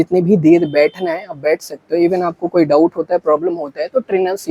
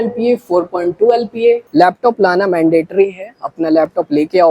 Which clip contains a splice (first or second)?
second